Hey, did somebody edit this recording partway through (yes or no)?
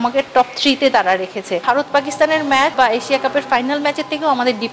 yes